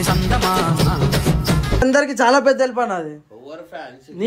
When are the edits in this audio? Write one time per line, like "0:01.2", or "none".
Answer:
0:01.8